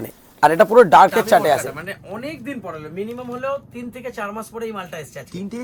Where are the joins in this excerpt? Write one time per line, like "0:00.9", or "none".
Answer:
0:01.7